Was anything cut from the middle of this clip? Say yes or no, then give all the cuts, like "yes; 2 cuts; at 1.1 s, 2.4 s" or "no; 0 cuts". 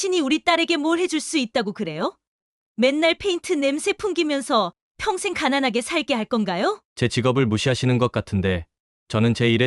no; 0 cuts